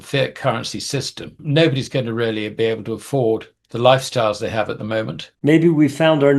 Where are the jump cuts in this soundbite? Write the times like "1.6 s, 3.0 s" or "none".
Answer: 1.4 s, 5.2 s